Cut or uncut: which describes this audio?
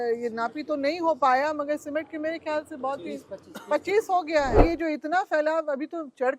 cut